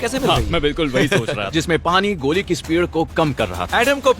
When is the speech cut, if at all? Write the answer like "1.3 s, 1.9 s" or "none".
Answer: 1.4 s